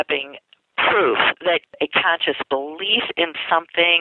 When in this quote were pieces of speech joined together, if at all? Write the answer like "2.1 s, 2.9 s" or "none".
1.7 s